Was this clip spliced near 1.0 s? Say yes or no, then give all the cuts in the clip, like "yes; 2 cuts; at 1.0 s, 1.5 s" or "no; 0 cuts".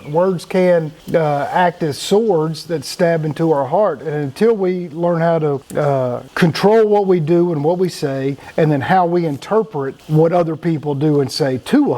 yes; 4 cuts; at 1.0 s, 6.2 s, 8.4 s, 10.0 s